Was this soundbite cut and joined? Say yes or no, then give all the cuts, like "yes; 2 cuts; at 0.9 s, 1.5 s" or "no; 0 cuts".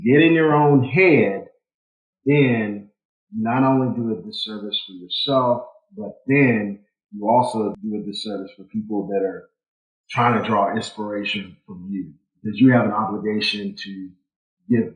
yes; 1 cut; at 7.7 s